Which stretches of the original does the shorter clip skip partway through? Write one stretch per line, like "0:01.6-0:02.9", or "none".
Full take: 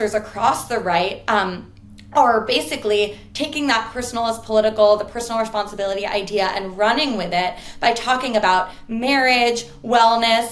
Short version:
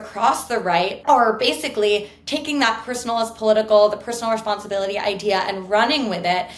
0:01.2-0:02.0